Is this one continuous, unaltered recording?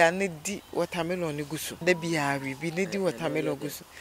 no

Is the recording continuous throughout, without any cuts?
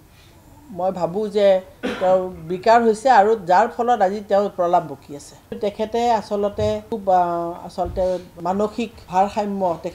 no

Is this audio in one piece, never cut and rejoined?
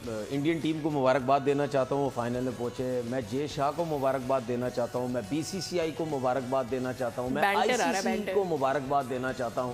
yes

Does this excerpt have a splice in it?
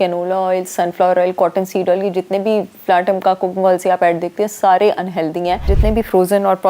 yes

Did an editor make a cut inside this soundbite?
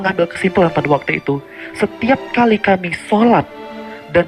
no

